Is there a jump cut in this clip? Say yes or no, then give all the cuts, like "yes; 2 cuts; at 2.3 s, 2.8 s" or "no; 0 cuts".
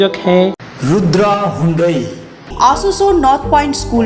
no; 0 cuts